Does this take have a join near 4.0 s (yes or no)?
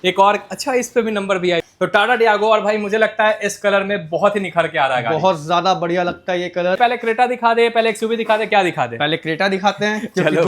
no